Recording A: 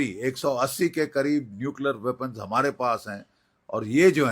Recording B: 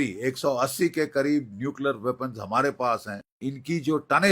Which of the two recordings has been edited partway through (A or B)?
B